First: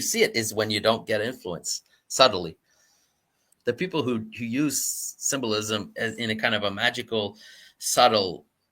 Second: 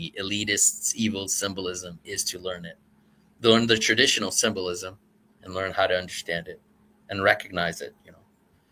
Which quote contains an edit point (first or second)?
first